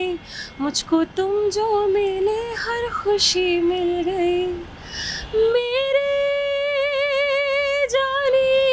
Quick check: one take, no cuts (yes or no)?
yes